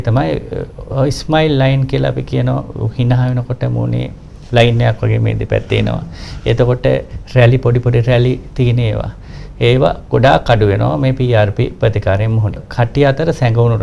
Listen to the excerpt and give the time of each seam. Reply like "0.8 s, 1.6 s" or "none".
12.6 s